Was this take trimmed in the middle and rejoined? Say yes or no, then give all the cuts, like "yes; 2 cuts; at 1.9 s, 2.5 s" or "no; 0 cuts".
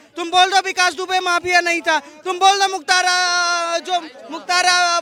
no; 0 cuts